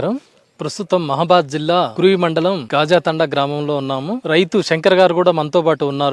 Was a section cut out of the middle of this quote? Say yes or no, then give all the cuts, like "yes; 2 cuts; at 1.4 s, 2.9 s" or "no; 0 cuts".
no; 0 cuts